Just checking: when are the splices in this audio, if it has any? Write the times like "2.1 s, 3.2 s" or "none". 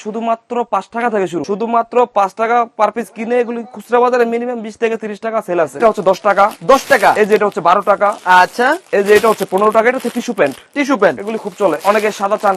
1.4 s, 5.8 s, 11.8 s